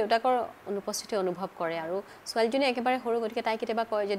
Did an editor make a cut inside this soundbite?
no; 0 cuts

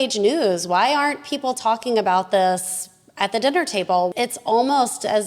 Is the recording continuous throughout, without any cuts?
no; 1 cut; at 4.1 s

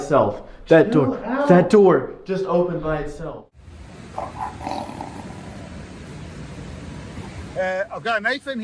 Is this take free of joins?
no; 2 cuts; at 3.2 s, 7.1 s

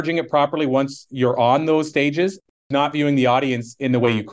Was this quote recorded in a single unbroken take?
no; 1 cut; at 2.4 s

